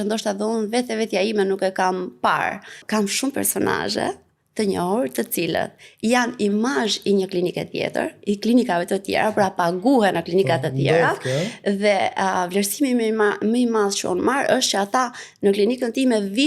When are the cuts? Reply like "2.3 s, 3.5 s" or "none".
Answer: 2.8 s